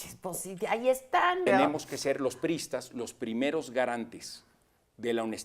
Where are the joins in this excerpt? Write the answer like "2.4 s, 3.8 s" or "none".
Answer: 1.5 s

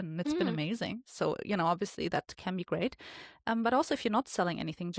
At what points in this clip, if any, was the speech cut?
none

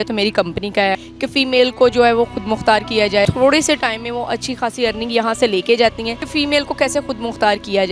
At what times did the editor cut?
1.0 s, 3.3 s, 6.1 s

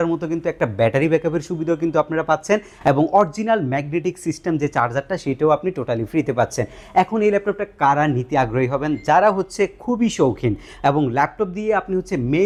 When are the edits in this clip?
none

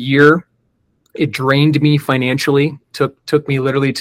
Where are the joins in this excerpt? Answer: none

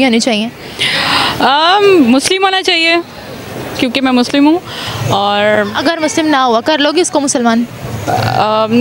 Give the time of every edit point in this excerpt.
none

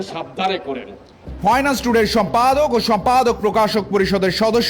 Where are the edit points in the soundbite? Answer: none

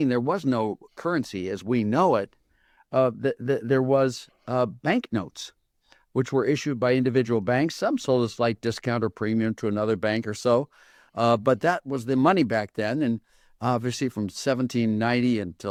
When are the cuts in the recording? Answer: none

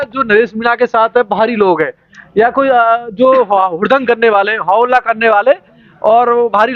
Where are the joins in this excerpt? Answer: none

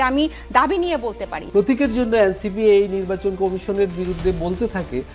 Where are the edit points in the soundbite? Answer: 1.4 s

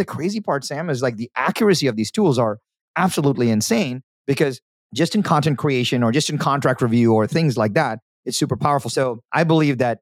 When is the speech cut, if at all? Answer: 8.9 s

